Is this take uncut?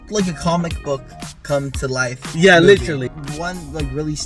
no; 1 cut; at 3.2 s

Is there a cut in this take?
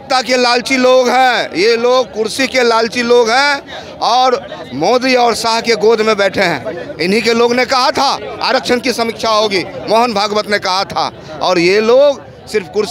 no; 0 cuts

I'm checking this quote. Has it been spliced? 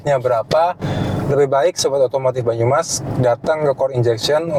no; 0 cuts

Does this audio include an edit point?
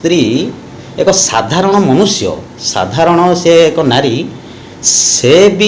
no; 0 cuts

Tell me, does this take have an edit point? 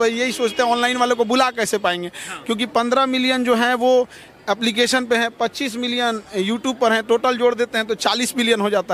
no; 0 cuts

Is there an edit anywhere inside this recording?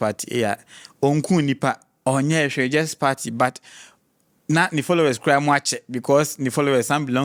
no; 0 cuts

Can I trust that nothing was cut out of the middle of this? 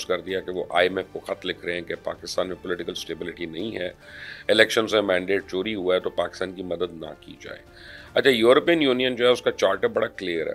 yes; 0 cuts

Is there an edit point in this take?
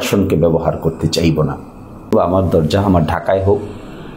yes; 1 cut; at 2.1 s

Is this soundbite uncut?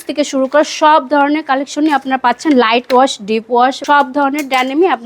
no; 1 cut; at 3.8 s

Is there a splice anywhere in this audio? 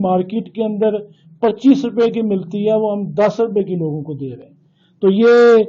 no; 0 cuts

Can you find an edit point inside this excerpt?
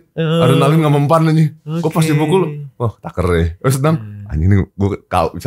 no; 0 cuts

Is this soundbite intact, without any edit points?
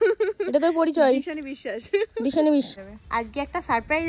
no; 1 cut; at 2.7 s

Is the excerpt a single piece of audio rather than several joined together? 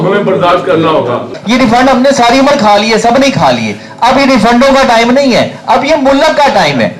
no; 1 cut; at 1.3 s

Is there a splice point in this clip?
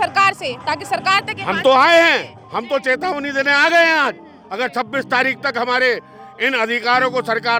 no; 0 cuts

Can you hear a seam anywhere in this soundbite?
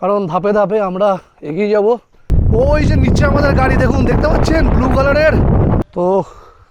yes; 2 cuts; at 2.3 s, 5.8 s

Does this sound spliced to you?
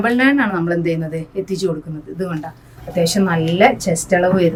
no; 0 cuts

